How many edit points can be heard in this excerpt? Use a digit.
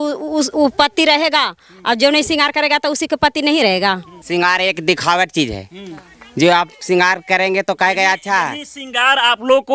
1